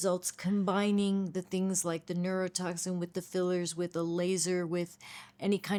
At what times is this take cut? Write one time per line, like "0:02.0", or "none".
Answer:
none